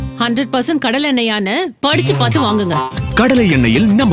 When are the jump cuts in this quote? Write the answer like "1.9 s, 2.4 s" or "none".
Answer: none